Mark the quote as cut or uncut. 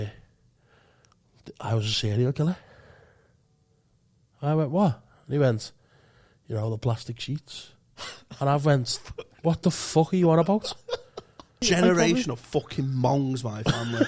cut